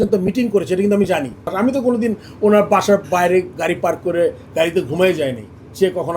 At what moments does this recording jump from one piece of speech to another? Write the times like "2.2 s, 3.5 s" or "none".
1.5 s